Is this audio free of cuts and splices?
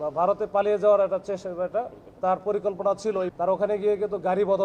no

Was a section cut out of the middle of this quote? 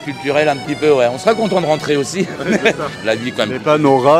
yes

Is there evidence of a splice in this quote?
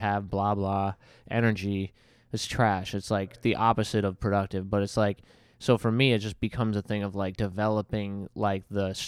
no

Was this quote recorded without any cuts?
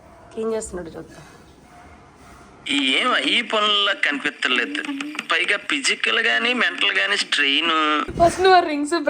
no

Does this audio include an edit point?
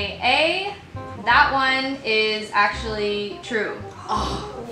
no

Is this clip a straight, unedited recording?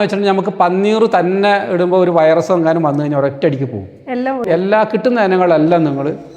no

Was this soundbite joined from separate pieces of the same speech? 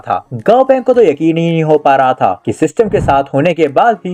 no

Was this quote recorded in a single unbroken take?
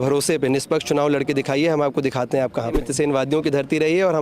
no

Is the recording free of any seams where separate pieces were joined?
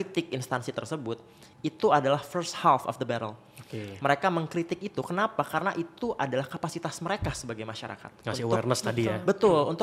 yes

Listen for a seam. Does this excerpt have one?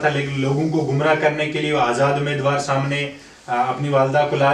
no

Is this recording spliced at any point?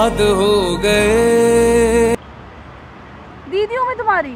no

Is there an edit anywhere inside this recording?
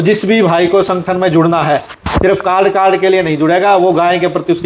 no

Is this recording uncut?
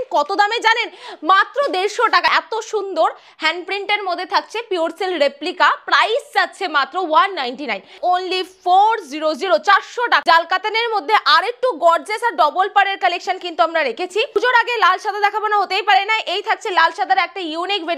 no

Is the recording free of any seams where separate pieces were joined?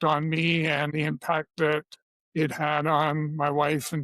no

